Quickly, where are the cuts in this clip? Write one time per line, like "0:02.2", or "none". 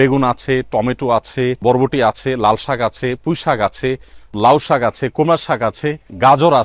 0:01.6
0:04.3